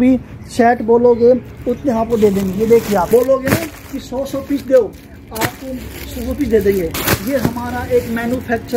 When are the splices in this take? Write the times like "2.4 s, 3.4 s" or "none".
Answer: 3.1 s